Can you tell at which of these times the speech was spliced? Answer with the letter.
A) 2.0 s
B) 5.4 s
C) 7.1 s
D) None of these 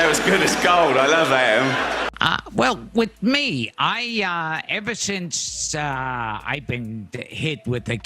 A